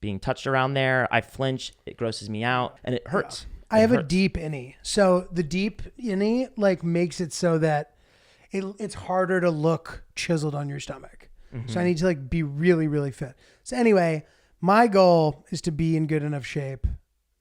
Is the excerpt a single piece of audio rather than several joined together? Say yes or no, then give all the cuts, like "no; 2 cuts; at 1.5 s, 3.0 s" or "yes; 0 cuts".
no; 1 cut; at 2.8 s